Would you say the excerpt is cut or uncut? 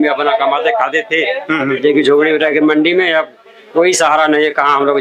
uncut